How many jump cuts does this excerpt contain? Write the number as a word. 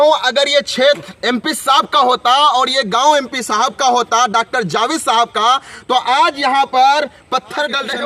zero